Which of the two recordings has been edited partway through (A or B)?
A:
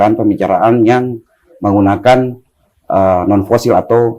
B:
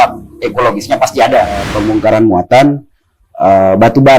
B